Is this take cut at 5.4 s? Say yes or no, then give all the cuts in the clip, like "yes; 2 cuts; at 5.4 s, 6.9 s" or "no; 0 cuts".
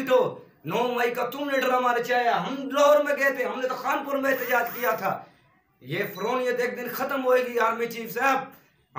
no; 0 cuts